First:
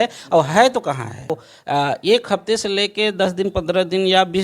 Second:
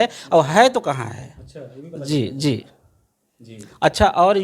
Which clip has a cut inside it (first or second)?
first